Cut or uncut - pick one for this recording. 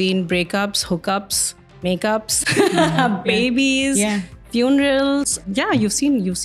cut